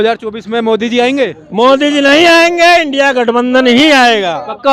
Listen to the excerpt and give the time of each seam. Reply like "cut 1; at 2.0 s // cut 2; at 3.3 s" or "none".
none